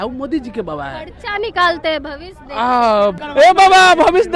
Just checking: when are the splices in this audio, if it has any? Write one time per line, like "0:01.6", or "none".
0:03.2